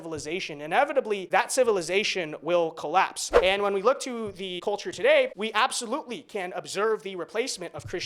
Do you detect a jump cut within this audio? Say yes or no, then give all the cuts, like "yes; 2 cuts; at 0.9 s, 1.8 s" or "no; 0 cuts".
yes; 4 cuts; at 1.2 s, 3.2 s, 4.5 s, 5.3 s